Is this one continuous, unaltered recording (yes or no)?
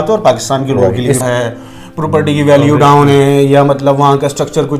no